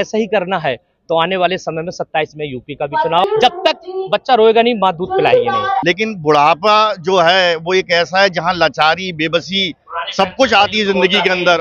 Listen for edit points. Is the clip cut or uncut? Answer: cut